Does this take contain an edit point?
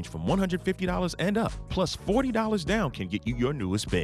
no; 0 cuts

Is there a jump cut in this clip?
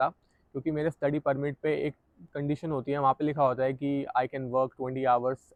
no; 0 cuts

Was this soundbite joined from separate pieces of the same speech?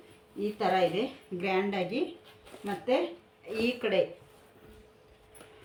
no; 0 cuts

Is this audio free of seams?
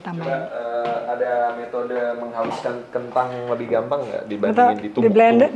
yes; 0 cuts

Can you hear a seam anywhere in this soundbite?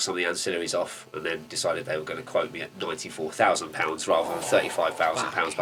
no; 0 cuts

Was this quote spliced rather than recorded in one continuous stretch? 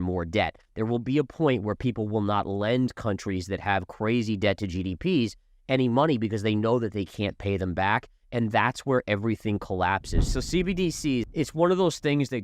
yes; 2 cuts; at 10.3 s, 11.3 s

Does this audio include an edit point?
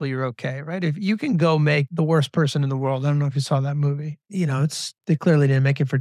yes; 2 cuts; at 1.9 s, 4.9 s

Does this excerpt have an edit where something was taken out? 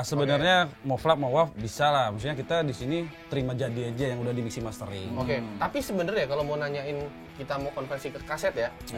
no; 0 cuts

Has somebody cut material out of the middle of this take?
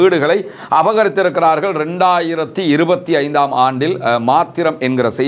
no; 0 cuts

